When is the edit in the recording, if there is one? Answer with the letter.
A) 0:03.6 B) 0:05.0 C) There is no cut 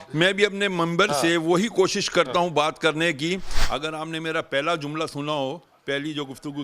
A